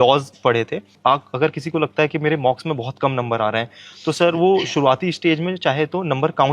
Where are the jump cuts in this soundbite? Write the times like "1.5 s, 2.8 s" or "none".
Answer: 0.9 s